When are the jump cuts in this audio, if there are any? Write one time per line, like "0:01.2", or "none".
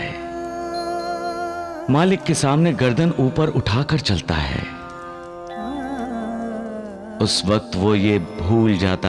none